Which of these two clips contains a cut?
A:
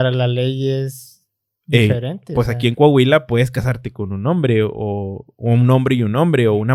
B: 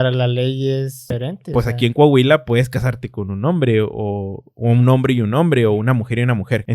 B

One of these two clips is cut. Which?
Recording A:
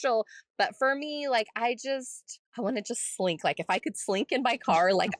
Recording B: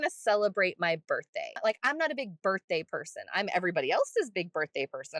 B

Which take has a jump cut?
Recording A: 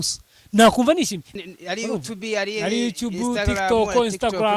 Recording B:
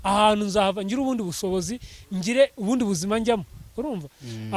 A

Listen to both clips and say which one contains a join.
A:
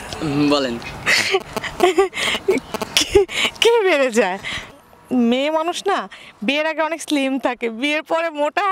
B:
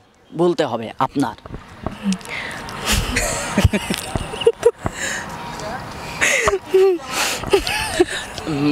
A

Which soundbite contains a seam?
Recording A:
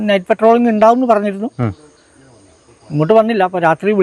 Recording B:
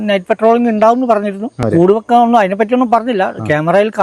B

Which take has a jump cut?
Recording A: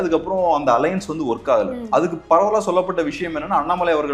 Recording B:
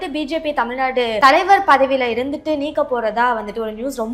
B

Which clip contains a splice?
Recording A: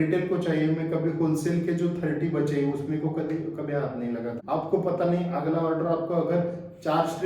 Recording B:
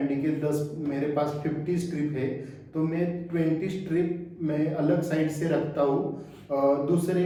A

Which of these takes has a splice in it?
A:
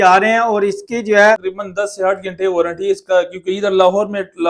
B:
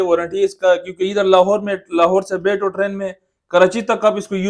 A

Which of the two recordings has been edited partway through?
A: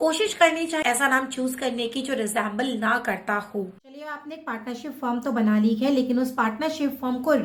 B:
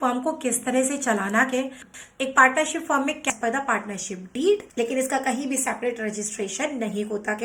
B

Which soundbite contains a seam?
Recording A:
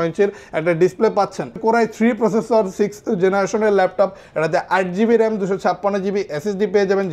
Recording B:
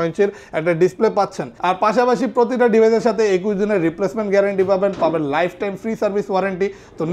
B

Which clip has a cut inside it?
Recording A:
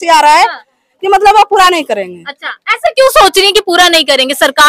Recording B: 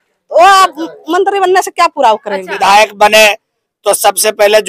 B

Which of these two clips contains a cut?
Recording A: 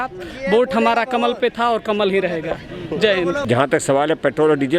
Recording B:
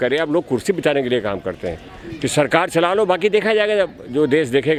A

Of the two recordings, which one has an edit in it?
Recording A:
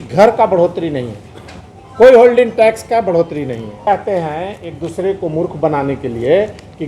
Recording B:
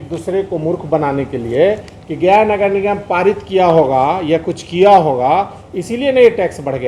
A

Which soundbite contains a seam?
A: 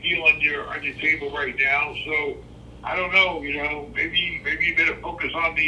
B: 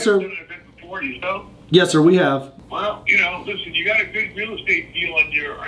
B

